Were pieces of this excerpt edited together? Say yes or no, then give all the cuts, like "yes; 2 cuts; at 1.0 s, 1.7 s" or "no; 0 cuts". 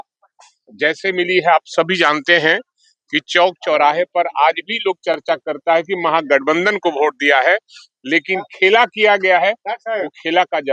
no; 0 cuts